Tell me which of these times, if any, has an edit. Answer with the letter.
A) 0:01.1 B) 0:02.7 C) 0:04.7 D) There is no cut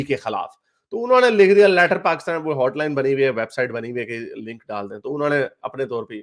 D